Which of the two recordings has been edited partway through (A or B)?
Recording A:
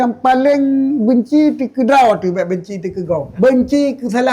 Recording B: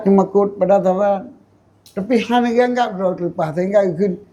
A